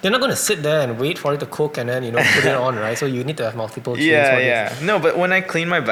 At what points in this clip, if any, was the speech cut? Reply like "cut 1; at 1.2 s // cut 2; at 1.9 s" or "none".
none